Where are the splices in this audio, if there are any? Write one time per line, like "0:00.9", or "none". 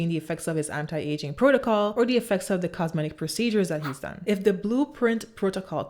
0:01.9
0:04.2